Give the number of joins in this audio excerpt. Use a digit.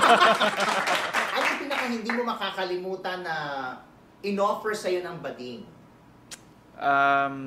1